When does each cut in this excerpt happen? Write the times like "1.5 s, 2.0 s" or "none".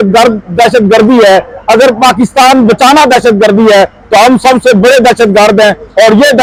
none